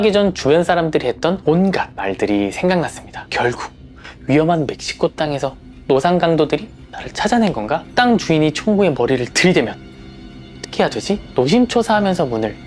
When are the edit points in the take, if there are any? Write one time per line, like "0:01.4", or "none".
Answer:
0:01.7